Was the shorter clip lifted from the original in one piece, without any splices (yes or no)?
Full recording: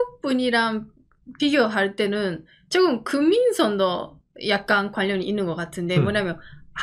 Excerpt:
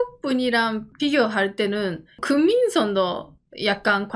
no